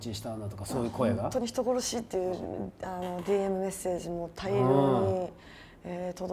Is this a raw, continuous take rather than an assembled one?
yes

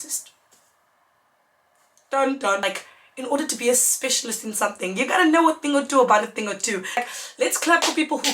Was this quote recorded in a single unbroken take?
no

